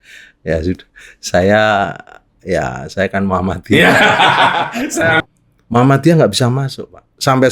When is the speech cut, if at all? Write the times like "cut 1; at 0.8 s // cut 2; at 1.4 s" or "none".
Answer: cut 1; at 5.2 s